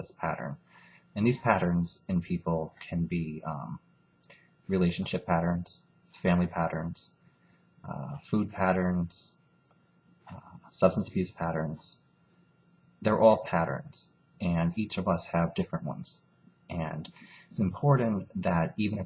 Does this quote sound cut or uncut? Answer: cut